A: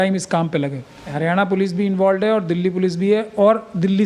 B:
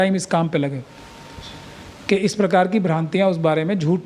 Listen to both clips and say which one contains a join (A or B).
A